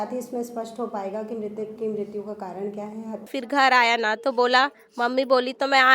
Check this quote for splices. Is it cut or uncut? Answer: cut